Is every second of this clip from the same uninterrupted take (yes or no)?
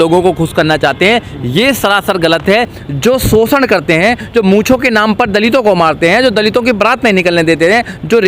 no